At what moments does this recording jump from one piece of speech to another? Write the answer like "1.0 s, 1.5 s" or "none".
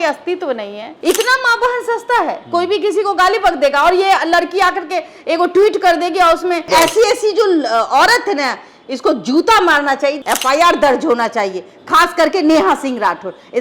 0.9 s, 6.7 s, 10.2 s